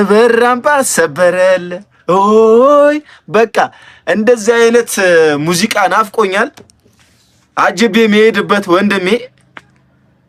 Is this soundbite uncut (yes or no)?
yes